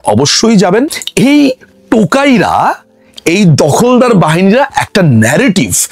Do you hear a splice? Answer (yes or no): yes